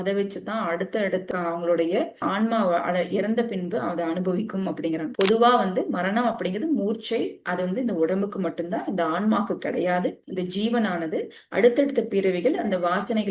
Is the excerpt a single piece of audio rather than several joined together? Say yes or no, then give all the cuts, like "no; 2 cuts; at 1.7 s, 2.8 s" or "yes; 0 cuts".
no; 2 cuts; at 1.3 s, 5.1 s